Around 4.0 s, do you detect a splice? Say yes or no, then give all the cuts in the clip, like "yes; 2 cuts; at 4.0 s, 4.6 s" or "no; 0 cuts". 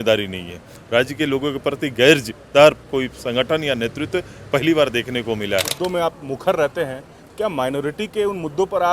no; 1 cut; at 5.7 s